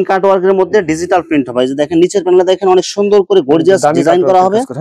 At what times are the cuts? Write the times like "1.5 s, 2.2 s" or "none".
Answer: none